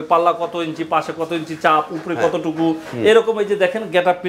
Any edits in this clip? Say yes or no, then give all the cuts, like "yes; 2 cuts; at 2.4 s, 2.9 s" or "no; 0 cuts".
no; 0 cuts